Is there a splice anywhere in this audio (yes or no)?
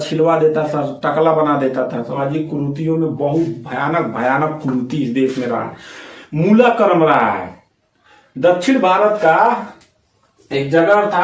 yes